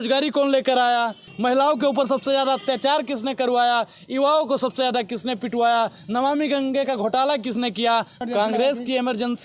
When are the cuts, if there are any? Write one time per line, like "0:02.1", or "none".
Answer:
0:01.3
0:08.2